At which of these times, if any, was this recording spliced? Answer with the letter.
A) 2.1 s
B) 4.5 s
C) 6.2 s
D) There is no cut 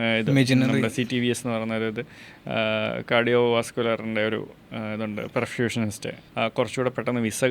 C